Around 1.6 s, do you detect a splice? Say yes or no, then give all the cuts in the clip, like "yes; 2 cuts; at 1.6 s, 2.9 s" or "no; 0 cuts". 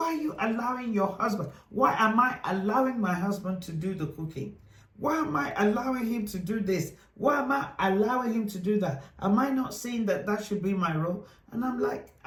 no; 0 cuts